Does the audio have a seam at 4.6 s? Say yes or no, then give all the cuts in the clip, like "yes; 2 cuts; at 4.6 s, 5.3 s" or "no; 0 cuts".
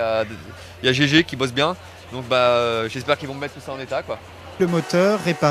yes; 1 cut; at 4.6 s